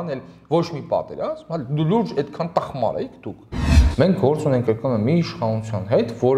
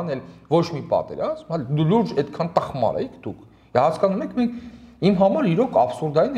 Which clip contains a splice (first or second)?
first